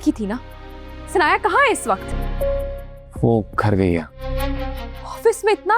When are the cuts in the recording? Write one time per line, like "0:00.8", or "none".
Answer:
0:02.1
0:04.2